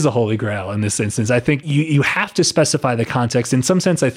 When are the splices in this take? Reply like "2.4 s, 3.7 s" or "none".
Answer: 1.6 s